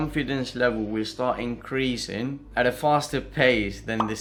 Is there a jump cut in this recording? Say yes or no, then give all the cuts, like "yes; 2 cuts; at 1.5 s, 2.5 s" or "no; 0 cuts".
no; 0 cuts